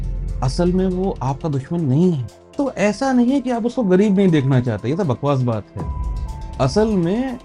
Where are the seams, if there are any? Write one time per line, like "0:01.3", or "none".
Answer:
0:02.4